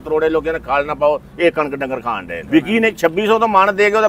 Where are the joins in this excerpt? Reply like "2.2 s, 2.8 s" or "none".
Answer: 2.3 s